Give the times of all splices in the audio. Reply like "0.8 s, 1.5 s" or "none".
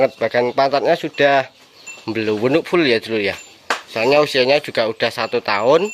none